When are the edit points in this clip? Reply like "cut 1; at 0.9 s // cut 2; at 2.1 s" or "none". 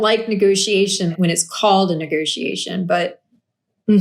cut 1; at 1.1 s